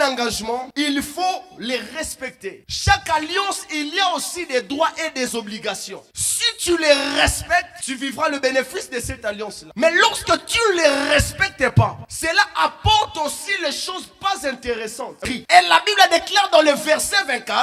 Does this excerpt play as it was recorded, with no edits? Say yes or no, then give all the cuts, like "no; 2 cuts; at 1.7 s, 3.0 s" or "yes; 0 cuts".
no; 1 cut; at 15.2 s